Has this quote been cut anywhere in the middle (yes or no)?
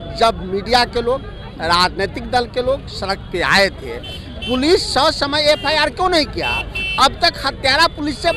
no